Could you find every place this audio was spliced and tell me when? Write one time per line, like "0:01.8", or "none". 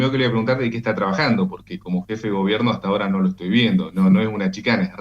none